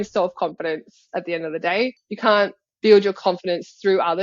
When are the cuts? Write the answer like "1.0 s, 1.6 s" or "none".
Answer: 2.0 s